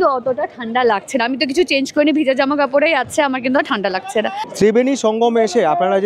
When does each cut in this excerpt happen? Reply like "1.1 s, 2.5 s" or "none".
4.4 s